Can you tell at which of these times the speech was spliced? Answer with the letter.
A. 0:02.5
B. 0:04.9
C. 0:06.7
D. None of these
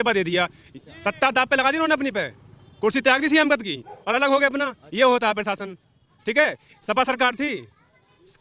D